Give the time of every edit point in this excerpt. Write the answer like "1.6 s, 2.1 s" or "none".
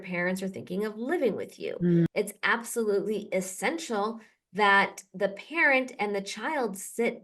2.1 s